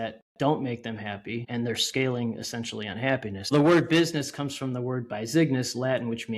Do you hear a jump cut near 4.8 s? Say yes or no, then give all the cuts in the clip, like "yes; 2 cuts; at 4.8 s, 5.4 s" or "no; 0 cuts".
no; 2 cuts; at 1.4 s, 3.5 s